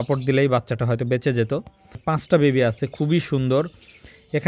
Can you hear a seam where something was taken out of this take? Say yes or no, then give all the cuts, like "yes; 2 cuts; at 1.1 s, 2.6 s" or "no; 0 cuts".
yes; 1 cut; at 2.0 s